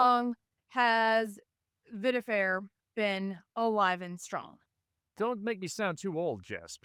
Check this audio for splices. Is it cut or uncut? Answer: uncut